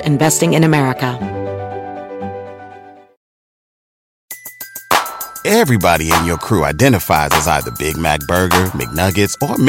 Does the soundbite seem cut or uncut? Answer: cut